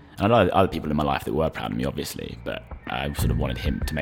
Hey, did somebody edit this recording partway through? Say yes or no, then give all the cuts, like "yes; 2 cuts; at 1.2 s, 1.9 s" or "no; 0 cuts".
no; 0 cuts